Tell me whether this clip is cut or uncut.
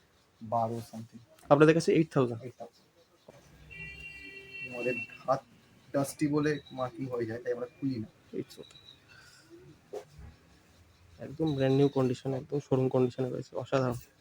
cut